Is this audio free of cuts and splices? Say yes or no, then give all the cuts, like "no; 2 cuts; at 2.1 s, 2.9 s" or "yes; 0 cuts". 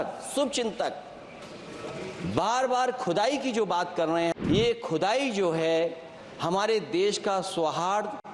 no; 1 cut; at 4.4 s